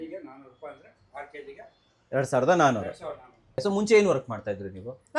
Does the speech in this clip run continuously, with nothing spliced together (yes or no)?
no